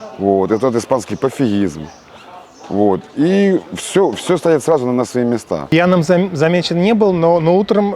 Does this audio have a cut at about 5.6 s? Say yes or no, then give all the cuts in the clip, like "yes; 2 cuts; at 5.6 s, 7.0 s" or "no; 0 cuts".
yes; 1 cut; at 5.6 s